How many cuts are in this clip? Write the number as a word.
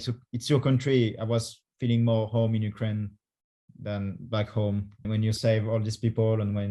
zero